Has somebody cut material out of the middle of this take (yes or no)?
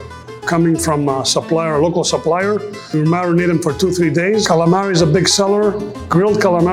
yes